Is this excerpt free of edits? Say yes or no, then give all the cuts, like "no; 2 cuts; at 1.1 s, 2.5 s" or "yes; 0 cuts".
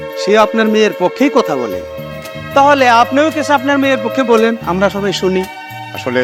yes; 0 cuts